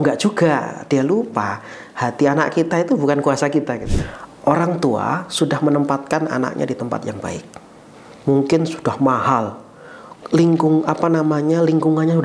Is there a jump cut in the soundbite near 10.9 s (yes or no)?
no